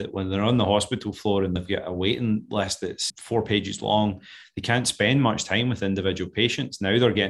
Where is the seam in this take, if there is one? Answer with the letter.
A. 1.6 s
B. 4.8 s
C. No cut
A